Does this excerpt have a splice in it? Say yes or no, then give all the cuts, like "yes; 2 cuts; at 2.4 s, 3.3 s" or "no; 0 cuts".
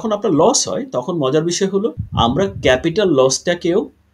yes; 1 cut; at 2.0 s